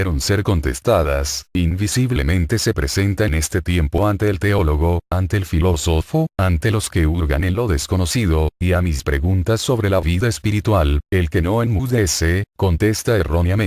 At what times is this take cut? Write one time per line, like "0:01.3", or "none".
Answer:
0:10.2

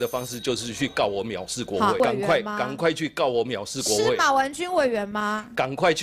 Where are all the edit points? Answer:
0:02.0

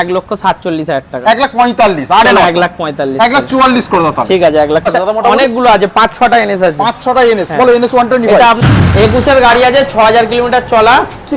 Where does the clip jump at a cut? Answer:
0:04.9
0:08.6

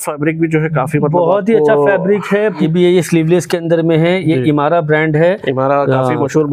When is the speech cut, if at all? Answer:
0:02.6

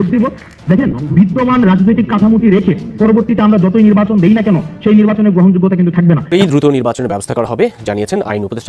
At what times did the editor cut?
0:06.2

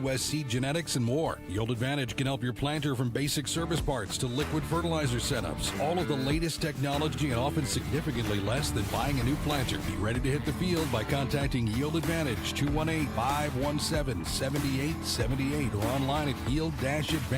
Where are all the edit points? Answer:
0:07.2

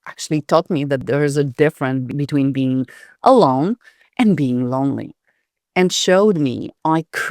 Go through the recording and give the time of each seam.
0:01.0
0:02.1

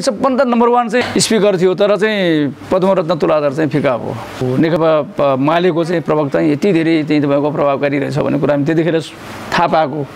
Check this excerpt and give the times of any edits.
0:01.0
0:04.8

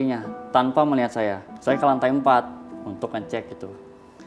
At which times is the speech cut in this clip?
0:01.5

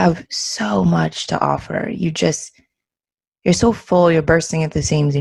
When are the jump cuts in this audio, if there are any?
none

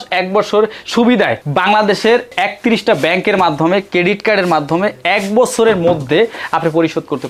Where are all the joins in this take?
none

